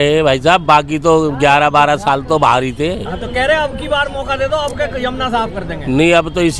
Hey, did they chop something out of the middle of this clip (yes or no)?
no